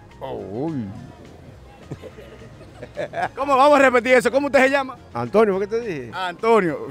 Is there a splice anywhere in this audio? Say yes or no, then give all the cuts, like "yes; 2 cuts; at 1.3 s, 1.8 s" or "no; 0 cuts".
no; 0 cuts